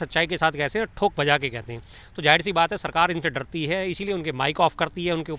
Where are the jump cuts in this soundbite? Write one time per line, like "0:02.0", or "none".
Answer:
none